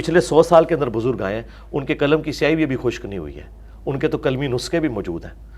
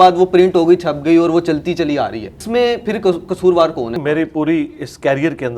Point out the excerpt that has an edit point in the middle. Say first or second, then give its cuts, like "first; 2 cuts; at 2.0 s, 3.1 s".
second; 2 cuts; at 2.4 s, 4.0 s